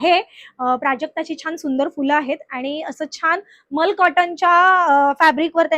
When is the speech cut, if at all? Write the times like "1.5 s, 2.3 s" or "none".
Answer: none